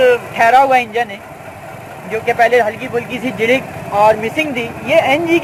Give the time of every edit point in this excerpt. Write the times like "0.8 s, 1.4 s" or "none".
none